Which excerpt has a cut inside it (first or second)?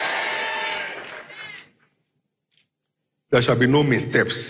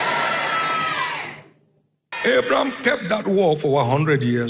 second